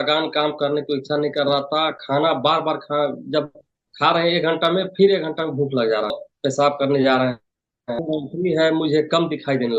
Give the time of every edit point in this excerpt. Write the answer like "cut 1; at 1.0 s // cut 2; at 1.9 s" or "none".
cut 1; at 6.3 s // cut 2; at 8.0 s